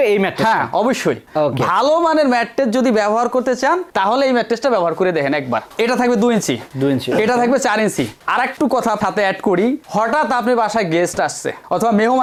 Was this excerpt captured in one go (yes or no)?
yes